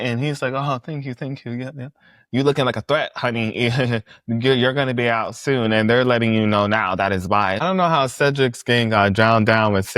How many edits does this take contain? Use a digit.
1